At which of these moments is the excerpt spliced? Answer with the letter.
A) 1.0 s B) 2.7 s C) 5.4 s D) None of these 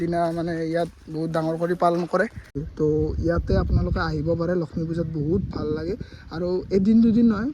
B